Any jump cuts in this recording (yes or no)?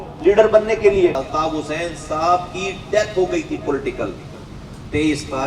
yes